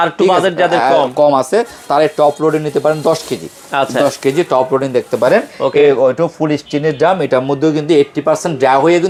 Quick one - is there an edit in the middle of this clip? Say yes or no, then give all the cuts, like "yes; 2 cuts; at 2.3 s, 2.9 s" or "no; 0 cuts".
no; 0 cuts